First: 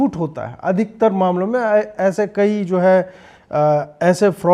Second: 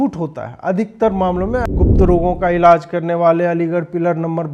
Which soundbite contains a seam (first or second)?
second